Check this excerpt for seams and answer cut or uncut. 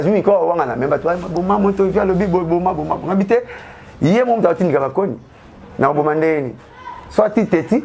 uncut